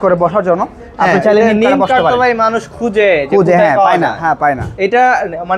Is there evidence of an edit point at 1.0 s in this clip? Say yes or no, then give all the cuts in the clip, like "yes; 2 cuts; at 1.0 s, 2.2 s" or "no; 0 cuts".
no; 0 cuts